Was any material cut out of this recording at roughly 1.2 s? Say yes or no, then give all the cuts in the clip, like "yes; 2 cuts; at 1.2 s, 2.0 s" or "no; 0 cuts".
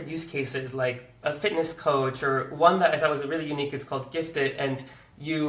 no; 0 cuts